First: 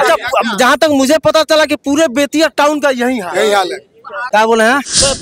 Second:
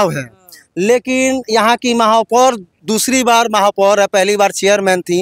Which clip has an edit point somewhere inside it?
first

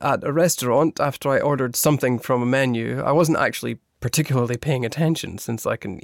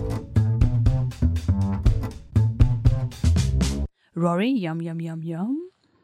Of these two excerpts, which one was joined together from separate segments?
second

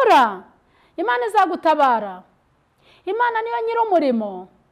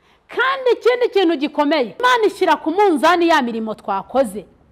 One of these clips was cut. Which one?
second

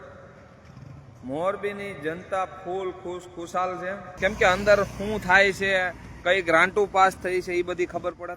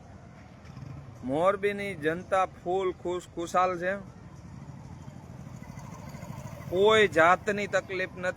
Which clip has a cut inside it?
first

